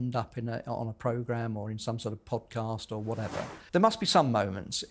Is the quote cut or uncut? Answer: cut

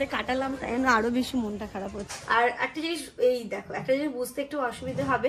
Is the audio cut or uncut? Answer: cut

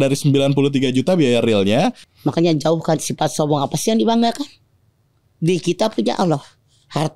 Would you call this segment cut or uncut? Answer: cut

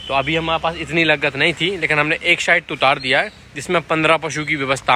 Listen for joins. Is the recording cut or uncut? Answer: uncut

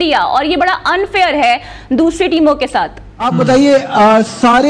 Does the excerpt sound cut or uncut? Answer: cut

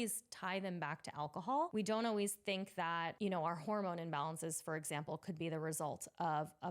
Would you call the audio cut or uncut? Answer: cut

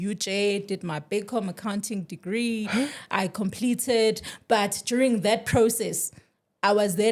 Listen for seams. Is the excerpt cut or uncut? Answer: uncut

